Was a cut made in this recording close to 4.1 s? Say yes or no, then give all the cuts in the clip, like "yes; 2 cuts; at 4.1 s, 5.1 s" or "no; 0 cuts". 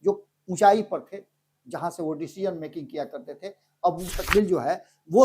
yes; 1 cut; at 4.1 s